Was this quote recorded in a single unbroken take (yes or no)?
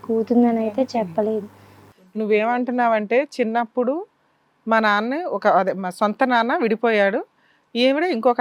yes